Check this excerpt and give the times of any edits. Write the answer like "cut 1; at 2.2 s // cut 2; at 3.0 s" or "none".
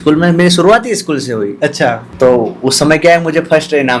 cut 1; at 2.0 s